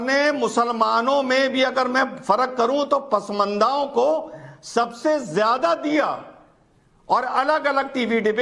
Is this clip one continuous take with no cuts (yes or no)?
yes